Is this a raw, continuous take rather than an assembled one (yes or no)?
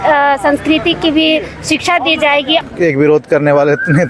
no